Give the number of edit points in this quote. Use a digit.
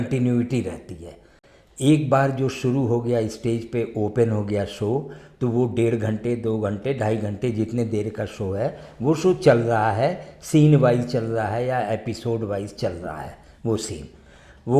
0